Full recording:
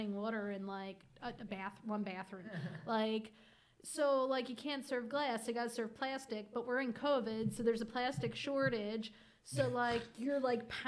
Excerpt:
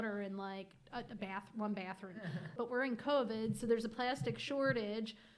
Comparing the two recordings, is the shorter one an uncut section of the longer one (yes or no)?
no